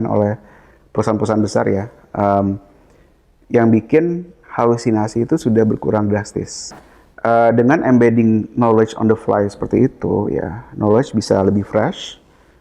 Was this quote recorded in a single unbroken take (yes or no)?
no